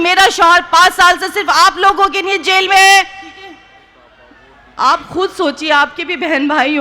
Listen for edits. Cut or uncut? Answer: cut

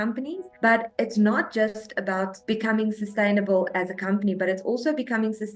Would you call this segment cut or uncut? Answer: cut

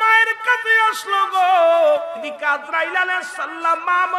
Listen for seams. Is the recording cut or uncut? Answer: cut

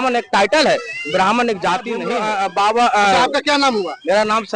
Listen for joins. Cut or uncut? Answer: cut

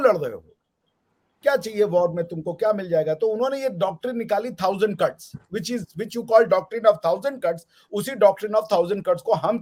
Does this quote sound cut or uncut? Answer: uncut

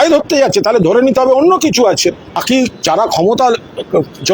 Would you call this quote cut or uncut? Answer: cut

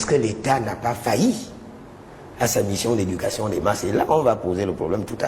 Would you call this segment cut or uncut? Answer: uncut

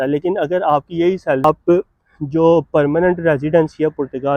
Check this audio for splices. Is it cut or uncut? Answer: cut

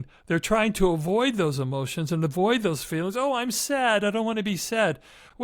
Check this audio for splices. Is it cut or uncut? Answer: uncut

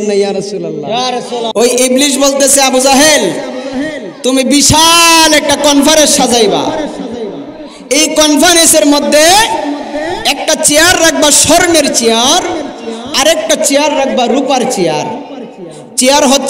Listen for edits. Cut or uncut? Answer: cut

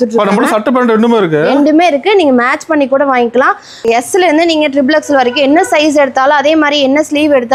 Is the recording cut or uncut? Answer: cut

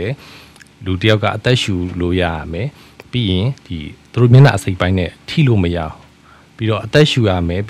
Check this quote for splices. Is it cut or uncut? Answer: uncut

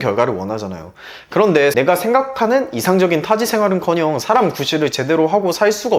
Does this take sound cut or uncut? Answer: cut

